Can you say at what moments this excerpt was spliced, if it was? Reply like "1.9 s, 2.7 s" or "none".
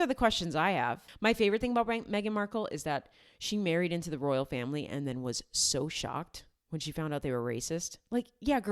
1.1 s